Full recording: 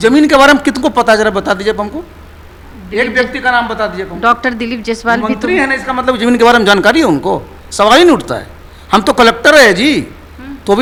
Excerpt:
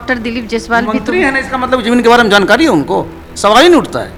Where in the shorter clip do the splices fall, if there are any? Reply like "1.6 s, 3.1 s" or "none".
none